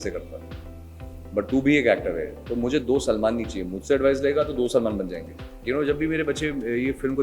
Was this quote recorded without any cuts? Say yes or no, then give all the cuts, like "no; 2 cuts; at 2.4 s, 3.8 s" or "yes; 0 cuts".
no; 1 cut; at 5.6 s